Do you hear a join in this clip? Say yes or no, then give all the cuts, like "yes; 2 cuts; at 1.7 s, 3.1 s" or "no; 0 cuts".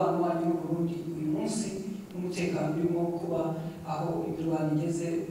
no; 0 cuts